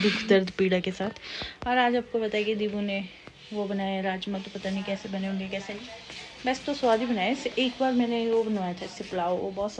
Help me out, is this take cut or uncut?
uncut